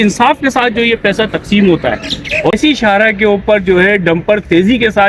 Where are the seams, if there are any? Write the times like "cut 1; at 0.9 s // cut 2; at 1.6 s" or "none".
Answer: cut 1; at 2.5 s